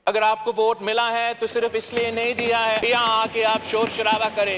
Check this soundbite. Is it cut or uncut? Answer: cut